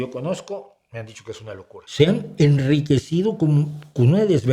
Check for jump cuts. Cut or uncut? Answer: cut